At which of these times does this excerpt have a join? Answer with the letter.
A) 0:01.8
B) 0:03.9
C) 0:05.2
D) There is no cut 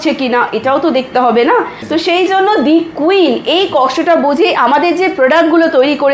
A